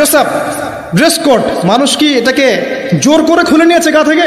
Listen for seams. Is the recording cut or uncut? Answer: uncut